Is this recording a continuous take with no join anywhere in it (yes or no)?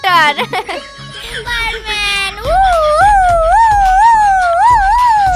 no